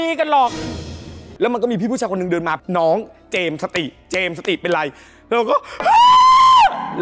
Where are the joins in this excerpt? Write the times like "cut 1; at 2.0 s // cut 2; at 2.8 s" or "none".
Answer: cut 1; at 1.3 s